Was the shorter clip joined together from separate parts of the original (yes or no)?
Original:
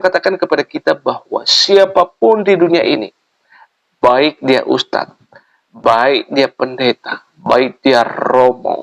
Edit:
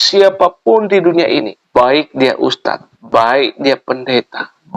yes